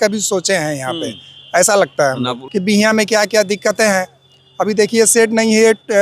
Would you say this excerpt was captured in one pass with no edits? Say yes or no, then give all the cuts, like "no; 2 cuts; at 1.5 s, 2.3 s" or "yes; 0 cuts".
no; 1 cut; at 2.4 s